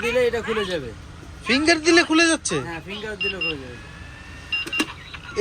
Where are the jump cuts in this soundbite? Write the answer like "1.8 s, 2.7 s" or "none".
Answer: none